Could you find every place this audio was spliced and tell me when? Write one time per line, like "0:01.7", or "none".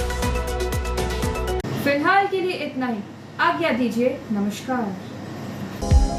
none